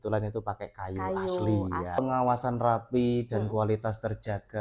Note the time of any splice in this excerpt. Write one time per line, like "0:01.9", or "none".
0:02.0